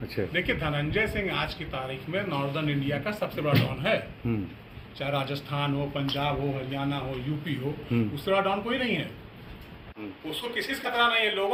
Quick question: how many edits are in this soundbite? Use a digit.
0